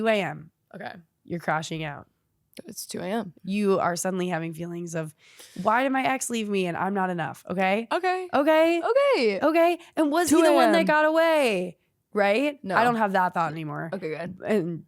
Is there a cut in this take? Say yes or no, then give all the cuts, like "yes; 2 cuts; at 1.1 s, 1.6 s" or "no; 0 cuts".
yes; 1 cut; at 3.3 s